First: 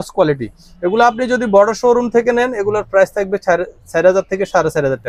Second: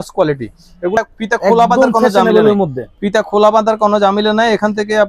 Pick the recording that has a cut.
second; 1 cut; at 1.0 s

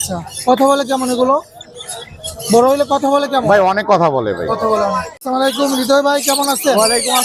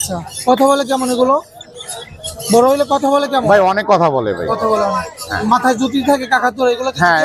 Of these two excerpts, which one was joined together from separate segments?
first; 1 cut; at 5.1 s

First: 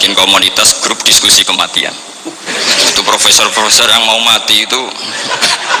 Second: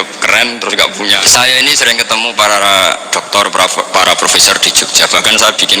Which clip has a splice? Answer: second; 1 cut; at 1.2 s

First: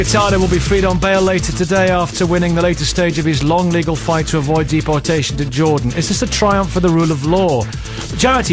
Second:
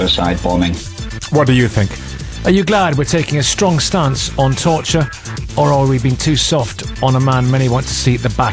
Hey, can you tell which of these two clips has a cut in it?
second; 1 cut; at 2.4 s

